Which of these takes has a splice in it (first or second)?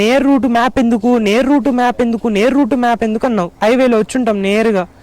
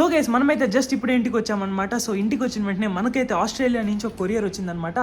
first